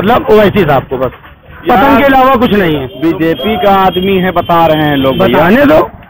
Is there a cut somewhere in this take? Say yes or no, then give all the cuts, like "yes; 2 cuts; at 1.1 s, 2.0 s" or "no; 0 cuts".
yes; 1 cut; at 2.9 s